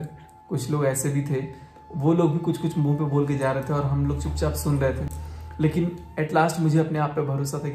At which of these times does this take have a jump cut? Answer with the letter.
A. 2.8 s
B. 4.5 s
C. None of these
C